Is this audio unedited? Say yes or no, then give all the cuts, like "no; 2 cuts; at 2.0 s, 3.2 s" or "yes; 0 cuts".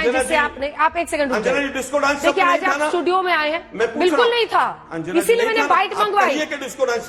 yes; 0 cuts